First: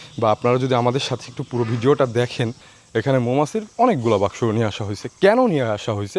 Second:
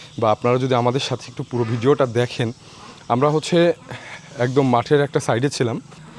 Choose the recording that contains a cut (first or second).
first